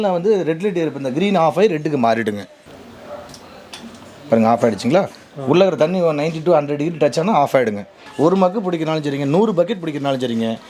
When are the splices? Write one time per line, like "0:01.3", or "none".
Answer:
0:02.7
0:08.0